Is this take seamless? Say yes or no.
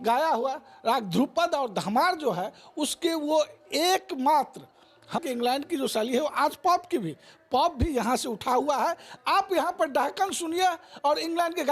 no